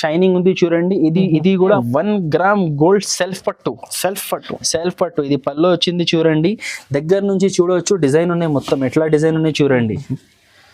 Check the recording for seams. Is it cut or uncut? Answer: cut